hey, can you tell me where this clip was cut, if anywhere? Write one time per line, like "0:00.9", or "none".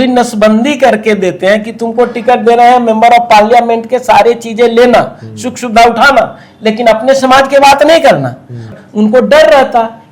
0:08.7